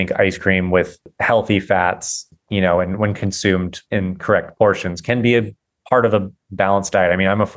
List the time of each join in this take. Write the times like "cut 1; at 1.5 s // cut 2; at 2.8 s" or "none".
cut 1; at 1.1 s // cut 2; at 2.2 s // cut 3; at 3.8 s

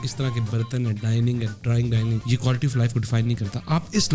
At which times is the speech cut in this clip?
cut 1; at 2.2 s

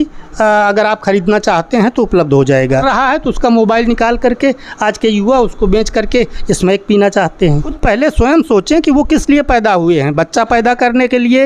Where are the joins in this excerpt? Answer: cut 1; at 2.8 s // cut 2; at 7.7 s

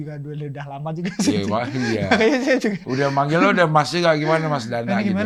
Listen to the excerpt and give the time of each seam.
none

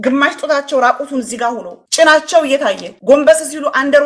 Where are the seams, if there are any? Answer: cut 1; at 1.7 s // cut 2; at 2.9 s

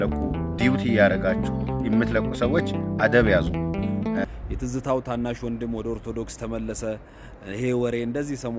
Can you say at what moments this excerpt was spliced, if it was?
cut 1; at 4.2 s

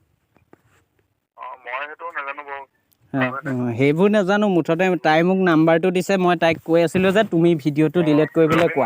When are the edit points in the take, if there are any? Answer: cut 1; at 3.3 s

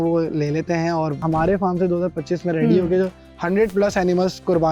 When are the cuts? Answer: cut 1; at 1.2 s

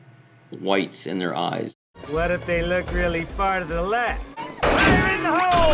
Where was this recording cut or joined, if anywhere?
cut 1; at 4.5 s

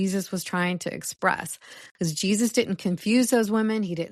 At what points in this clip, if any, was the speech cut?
none

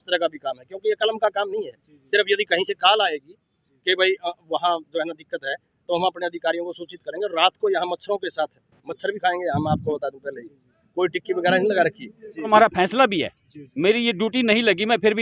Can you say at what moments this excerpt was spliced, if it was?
cut 1; at 12.5 s

